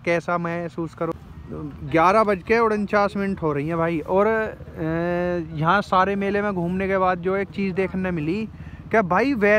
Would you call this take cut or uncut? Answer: cut